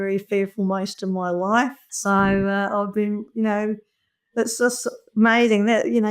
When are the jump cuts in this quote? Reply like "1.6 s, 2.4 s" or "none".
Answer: none